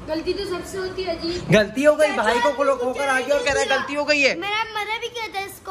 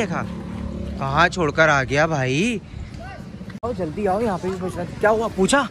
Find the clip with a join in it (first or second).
second